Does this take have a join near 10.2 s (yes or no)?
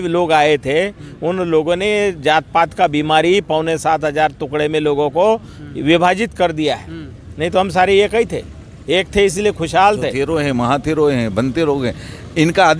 yes